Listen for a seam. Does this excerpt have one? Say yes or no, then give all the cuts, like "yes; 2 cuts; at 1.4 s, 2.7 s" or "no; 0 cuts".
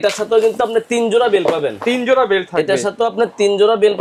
no; 0 cuts